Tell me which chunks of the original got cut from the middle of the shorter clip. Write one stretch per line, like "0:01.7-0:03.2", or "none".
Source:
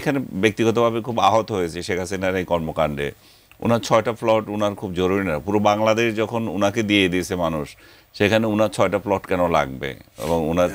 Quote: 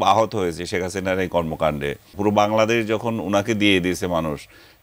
0:03.3-0:05.4

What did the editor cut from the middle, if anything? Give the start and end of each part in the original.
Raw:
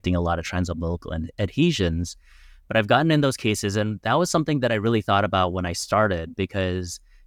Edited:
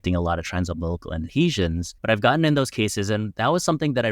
0:01.3-0:01.5
0:02.1-0:02.5

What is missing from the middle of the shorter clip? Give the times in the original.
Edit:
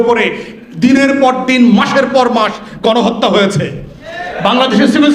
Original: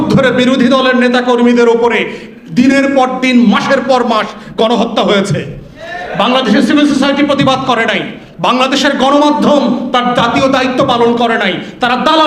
none

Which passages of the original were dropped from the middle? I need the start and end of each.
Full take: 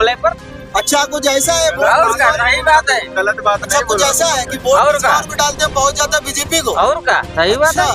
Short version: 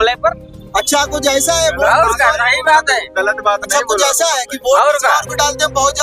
none

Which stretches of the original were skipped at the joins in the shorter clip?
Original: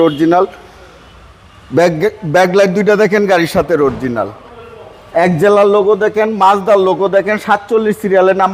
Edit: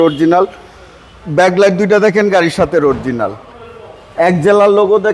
0:01.2-0:02.2

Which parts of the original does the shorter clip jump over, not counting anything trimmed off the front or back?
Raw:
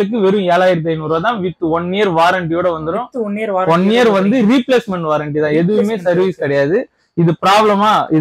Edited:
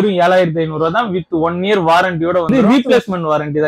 0:02.8-0:04.3

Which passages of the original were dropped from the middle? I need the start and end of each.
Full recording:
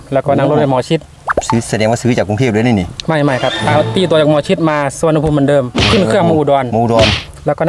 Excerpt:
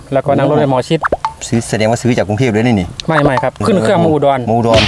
0:03.6-0:05.8

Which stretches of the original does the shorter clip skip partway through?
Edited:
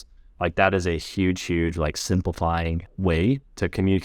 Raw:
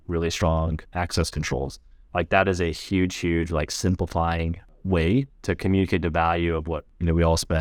0:04.6-0:04.7

